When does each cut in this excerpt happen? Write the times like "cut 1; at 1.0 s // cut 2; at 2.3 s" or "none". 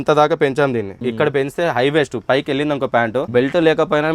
cut 1; at 0.9 s // cut 2; at 3.3 s